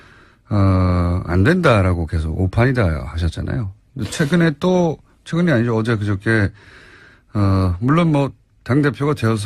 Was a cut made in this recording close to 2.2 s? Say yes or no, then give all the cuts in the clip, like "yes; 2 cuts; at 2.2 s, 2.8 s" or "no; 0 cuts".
yes; 1 cut; at 2.2 s